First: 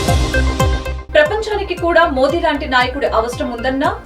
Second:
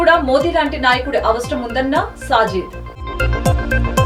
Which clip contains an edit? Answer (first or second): first